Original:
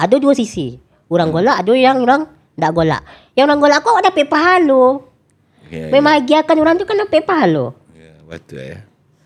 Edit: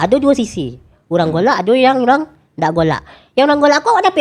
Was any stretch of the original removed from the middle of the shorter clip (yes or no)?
no